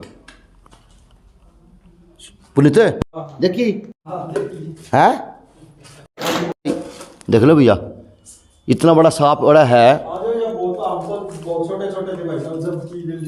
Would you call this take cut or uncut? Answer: uncut